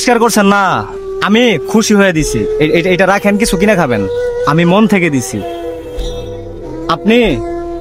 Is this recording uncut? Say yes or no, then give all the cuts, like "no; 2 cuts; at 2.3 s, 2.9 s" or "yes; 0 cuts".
no; 3 cuts; at 4.4 s, 5.2 s, 6.8 s